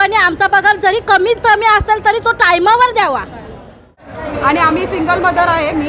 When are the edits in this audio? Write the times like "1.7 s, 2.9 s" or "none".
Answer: 4.1 s

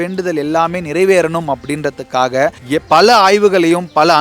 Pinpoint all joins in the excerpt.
2.6 s

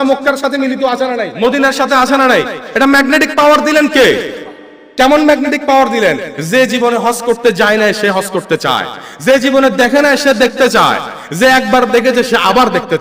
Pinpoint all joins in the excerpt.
1.3 s

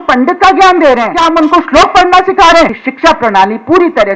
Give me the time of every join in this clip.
1.1 s, 2.8 s

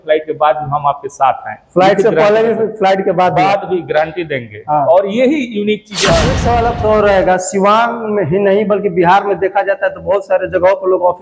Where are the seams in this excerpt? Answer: 6.4 s

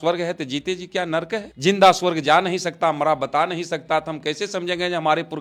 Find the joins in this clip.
none

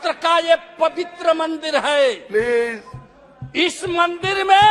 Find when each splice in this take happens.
none

